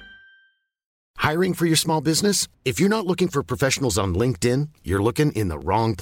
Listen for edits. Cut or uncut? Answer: cut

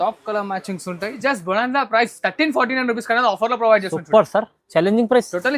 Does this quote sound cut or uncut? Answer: cut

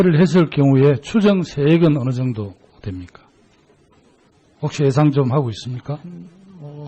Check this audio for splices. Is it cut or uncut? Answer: cut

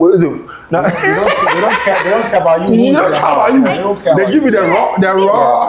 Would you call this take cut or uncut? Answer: uncut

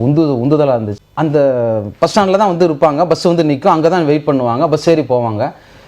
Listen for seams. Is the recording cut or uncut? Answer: cut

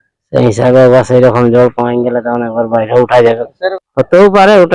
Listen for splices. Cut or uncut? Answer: cut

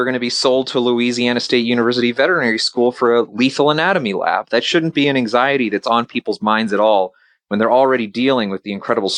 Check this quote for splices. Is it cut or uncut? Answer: uncut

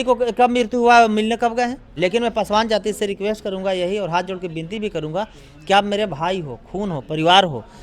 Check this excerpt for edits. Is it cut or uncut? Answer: cut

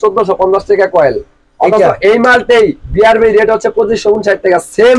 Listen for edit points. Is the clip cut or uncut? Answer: uncut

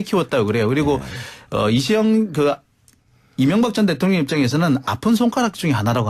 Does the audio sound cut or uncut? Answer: uncut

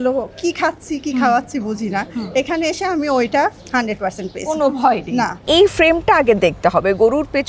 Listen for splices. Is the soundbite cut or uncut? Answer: cut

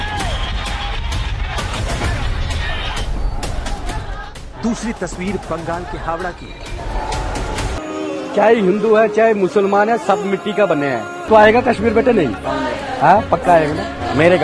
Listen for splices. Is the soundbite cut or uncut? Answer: cut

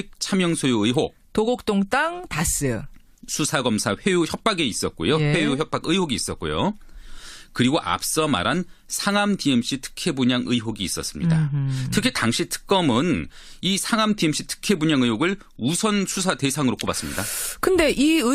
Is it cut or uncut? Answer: cut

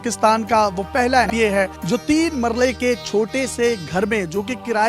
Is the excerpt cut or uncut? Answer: cut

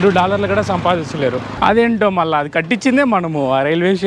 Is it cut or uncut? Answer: cut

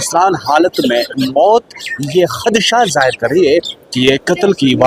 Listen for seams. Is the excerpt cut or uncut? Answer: uncut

